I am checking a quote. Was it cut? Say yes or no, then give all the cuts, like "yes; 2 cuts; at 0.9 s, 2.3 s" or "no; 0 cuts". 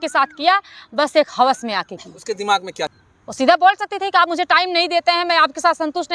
yes; 1 cut; at 3.0 s